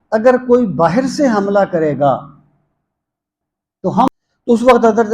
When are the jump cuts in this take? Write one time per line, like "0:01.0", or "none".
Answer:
0:04.1